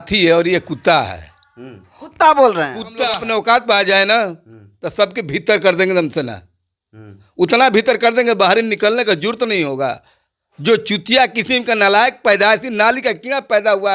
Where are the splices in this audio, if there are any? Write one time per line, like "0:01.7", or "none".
0:03.2